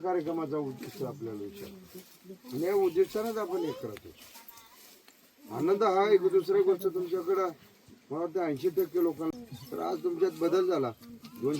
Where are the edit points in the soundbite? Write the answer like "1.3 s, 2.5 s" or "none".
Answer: 9.5 s